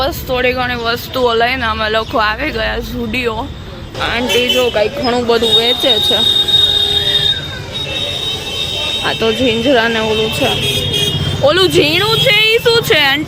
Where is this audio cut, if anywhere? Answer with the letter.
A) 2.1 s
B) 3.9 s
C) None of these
B